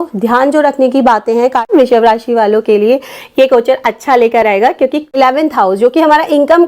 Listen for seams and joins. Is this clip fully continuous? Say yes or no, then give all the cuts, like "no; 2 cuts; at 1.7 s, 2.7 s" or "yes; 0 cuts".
no; 2 cuts; at 1.7 s, 5.2 s